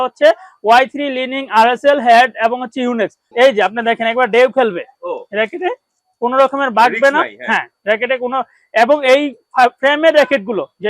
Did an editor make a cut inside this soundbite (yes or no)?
yes